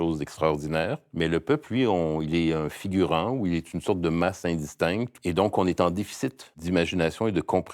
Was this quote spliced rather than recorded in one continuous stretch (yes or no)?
yes